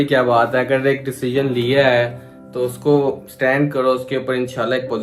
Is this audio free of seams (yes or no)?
yes